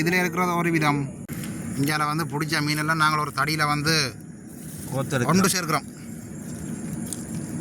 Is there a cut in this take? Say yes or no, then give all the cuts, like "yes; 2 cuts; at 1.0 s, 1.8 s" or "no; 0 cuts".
yes; 1 cut; at 1.3 s